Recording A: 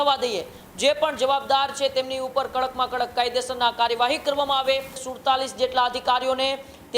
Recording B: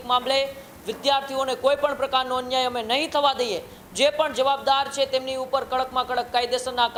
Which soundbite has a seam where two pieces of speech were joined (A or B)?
A